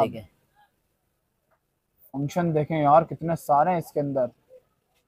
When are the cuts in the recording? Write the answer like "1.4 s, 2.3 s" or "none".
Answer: none